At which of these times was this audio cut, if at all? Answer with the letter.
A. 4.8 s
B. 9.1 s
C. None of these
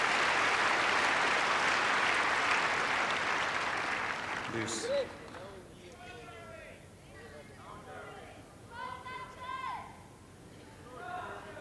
C